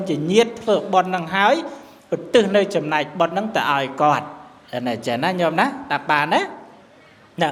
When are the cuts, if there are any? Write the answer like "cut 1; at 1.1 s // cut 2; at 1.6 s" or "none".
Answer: none